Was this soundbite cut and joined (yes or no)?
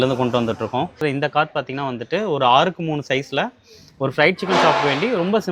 yes